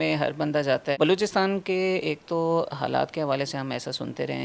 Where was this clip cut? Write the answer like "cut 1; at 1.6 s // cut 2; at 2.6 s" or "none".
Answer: cut 1; at 1.0 s